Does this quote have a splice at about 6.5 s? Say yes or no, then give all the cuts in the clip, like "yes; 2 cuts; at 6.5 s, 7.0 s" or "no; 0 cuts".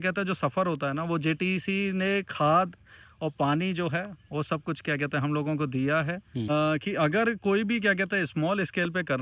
yes; 1 cut; at 6.5 s